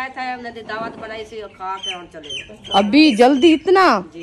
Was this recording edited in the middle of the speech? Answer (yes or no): no